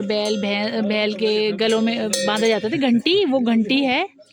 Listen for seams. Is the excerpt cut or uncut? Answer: uncut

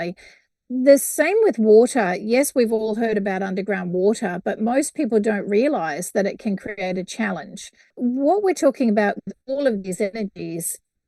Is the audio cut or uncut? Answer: cut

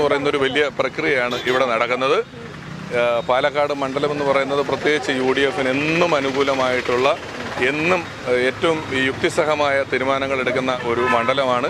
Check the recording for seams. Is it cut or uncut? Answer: uncut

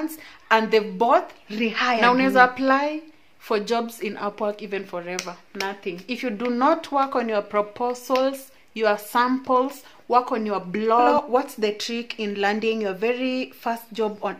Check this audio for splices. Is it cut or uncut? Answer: cut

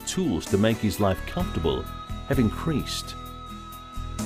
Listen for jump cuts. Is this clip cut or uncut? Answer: uncut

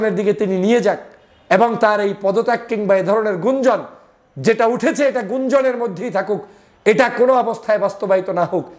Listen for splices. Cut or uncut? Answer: uncut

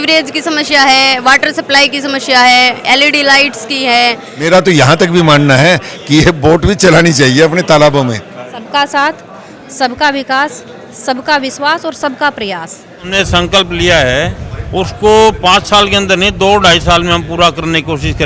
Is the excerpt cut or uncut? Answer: cut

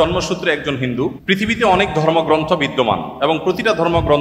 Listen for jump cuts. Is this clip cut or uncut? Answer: cut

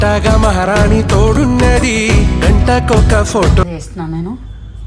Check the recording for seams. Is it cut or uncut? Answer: cut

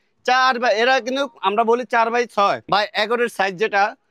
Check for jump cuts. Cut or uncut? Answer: cut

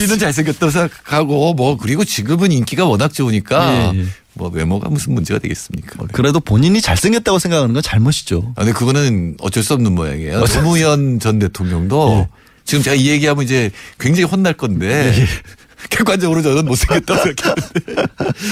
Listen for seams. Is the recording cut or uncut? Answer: uncut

